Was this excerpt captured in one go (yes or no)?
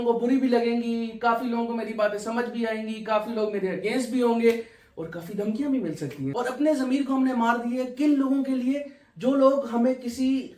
no